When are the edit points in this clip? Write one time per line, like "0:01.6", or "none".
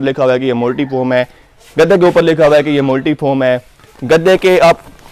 none